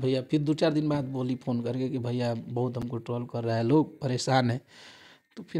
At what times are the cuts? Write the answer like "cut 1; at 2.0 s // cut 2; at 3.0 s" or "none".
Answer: none